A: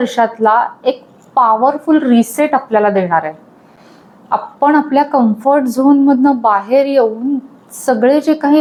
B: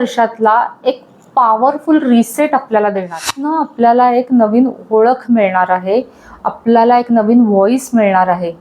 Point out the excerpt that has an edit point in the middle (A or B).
B